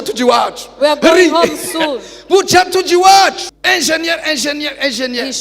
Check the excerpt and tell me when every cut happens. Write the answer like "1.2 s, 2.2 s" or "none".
3.4 s